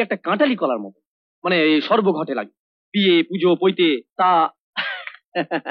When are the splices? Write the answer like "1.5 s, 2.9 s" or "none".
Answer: 4.1 s